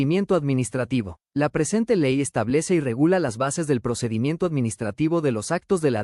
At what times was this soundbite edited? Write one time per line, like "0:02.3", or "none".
none